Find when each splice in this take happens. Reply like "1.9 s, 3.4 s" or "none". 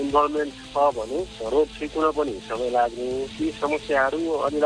3.3 s